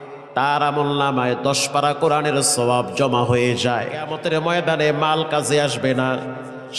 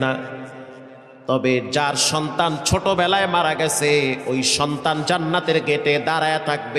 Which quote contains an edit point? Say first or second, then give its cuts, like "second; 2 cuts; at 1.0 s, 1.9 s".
first; 1 cut; at 4.1 s